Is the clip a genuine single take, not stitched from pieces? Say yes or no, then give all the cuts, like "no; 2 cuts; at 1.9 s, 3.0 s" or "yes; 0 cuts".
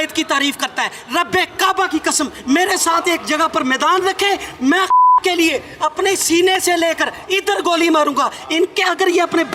yes; 0 cuts